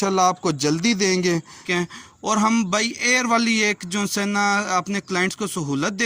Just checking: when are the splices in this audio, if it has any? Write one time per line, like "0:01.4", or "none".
0:01.6